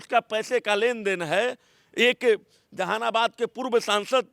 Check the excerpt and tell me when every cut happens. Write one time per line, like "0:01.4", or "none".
none

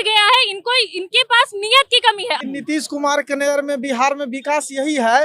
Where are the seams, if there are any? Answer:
0:02.4

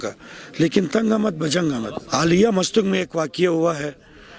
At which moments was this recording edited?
0:02.0

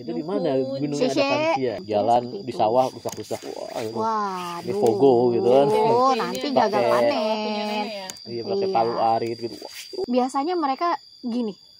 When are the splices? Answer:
0:02.1
0:09.9

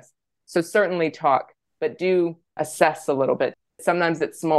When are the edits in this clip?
0:02.5
0:03.7

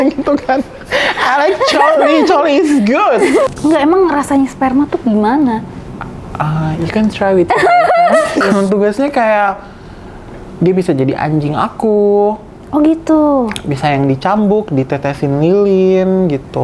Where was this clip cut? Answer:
0:03.5
0:08.4

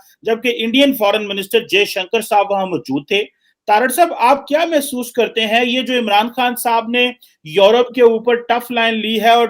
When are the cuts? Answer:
none

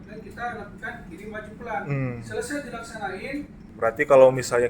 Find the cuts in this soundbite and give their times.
0:03.6

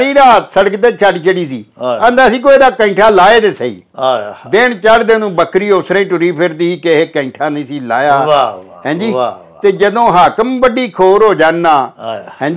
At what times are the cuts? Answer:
none

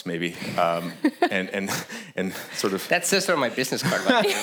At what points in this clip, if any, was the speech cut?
none

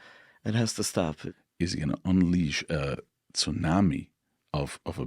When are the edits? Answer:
0:01.3

